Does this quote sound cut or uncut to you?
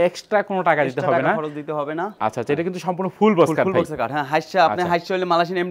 uncut